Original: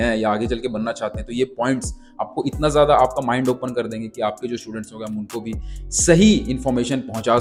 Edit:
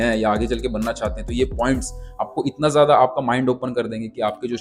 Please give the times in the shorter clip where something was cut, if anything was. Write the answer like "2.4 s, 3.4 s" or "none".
none